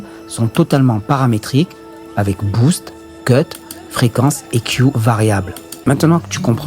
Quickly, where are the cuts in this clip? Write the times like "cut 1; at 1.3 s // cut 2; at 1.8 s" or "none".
cut 1; at 5.6 s